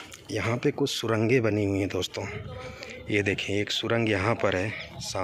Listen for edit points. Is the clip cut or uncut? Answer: uncut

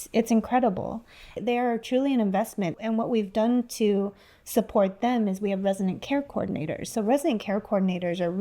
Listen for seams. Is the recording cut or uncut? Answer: cut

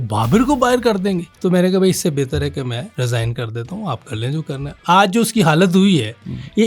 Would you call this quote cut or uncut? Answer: cut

